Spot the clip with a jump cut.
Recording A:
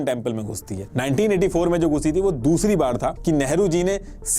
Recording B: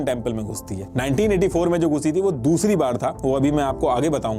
A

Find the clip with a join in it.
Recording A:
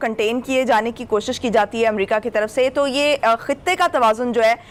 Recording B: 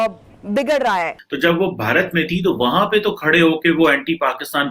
B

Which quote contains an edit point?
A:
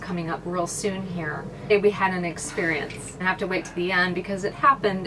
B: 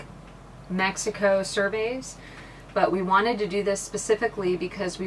A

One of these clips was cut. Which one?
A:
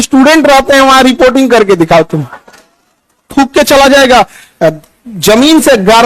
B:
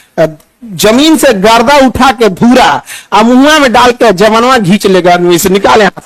A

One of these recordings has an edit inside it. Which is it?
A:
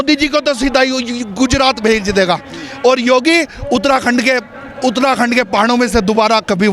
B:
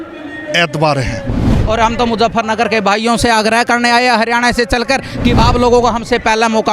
B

